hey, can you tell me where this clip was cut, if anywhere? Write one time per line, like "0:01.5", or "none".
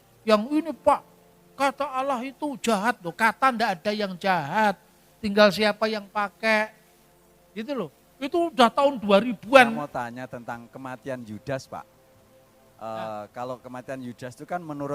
0:09.8